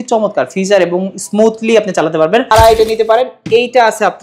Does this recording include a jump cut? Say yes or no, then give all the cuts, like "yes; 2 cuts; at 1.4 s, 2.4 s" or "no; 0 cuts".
yes; 1 cut; at 2.5 s